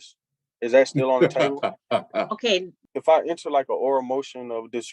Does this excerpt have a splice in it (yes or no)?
yes